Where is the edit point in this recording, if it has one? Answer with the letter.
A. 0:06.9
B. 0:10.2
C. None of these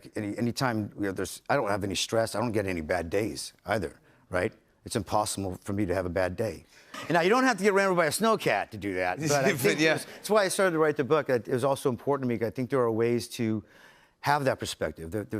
A